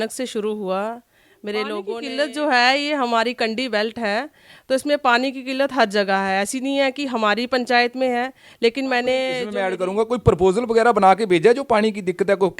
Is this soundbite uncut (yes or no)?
no